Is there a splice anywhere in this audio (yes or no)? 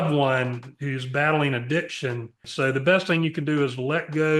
yes